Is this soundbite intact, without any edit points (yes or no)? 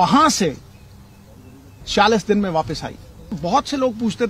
no